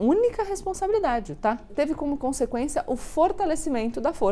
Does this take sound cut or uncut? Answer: cut